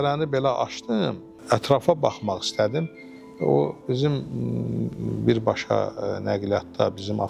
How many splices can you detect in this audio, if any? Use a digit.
0